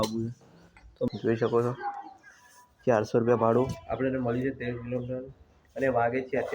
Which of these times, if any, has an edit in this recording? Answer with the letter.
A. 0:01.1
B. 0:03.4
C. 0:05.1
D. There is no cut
A